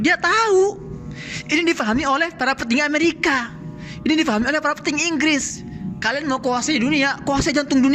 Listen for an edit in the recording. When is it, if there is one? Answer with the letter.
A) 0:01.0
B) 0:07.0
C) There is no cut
C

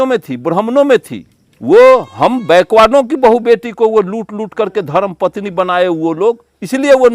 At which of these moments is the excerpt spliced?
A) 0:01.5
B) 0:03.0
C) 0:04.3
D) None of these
A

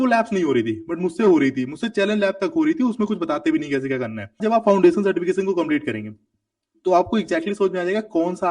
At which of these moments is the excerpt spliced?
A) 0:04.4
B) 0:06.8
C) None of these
A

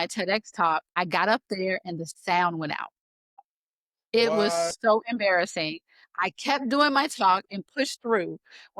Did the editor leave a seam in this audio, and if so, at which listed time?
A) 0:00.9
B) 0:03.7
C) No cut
A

